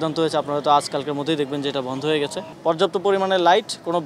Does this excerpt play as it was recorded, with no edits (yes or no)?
no